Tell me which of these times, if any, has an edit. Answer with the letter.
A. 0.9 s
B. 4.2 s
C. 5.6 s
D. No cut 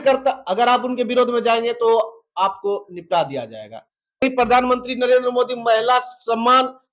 B